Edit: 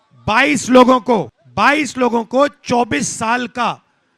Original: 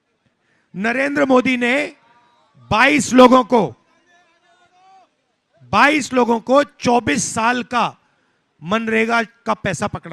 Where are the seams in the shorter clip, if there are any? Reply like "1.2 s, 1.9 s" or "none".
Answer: 1.4 s